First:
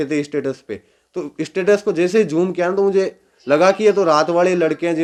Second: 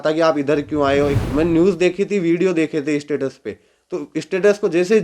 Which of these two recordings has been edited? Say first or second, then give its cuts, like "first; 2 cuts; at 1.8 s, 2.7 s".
second; 1 cut; at 1.2 s